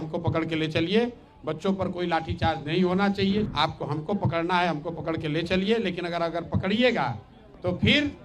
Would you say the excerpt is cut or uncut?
cut